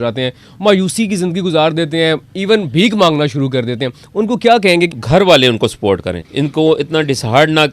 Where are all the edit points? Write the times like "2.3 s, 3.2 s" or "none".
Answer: 4.9 s, 6.2 s